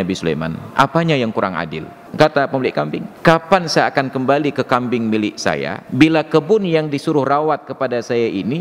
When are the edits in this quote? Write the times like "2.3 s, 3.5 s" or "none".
2.1 s, 3.0 s, 5.8 s

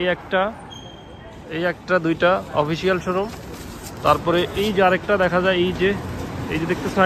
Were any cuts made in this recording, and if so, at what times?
none

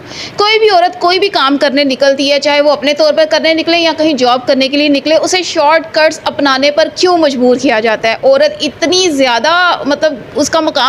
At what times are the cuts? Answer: none

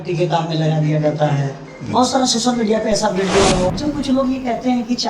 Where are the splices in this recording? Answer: 3.7 s

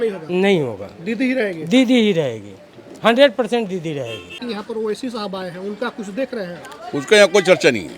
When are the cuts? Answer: 4.4 s

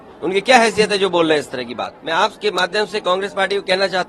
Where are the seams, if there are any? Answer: 2.0 s

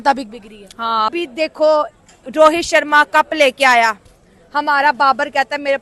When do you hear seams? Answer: 1.1 s

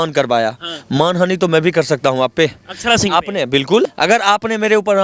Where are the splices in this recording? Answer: 3.9 s

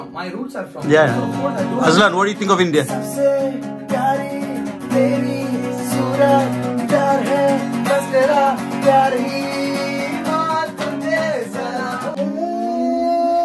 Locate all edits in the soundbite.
12.2 s

